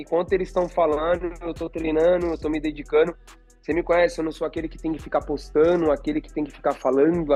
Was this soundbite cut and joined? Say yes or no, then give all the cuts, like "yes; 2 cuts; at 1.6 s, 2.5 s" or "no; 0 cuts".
no; 0 cuts